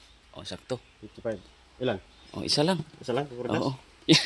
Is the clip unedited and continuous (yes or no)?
yes